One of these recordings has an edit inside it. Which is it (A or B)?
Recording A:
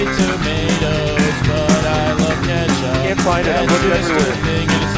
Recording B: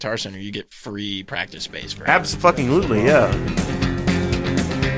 B